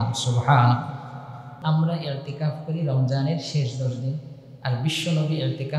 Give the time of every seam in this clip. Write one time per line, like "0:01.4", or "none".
0:01.4